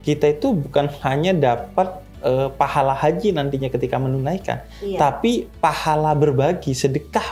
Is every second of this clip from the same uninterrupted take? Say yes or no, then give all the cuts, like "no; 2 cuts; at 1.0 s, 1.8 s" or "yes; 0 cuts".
yes; 0 cuts